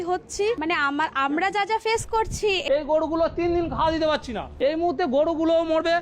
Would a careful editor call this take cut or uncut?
cut